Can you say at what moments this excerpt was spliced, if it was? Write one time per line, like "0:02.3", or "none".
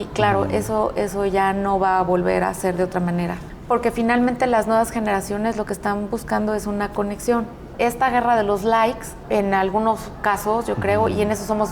0:03.5
0:07.6
0:09.1